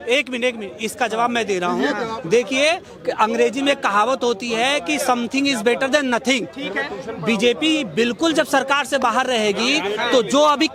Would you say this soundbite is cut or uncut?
uncut